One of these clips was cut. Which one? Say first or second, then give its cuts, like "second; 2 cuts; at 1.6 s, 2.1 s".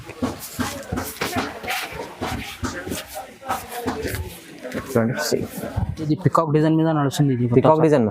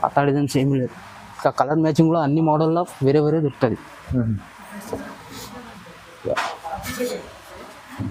first; 1 cut; at 6.0 s